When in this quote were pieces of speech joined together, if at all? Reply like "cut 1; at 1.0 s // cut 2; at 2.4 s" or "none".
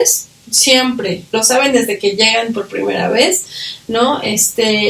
cut 1; at 1.3 s